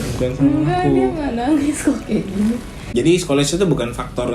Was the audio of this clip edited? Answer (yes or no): yes